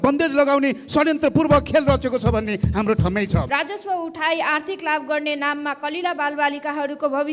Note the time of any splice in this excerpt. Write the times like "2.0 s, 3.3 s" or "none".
3.5 s